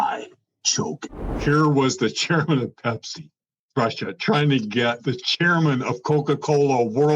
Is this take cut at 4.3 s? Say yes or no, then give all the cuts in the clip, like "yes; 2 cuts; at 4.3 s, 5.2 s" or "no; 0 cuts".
no; 1 cut; at 1.3 s